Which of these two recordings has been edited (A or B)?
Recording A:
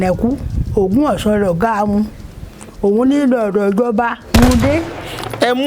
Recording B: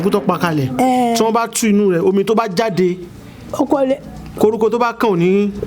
A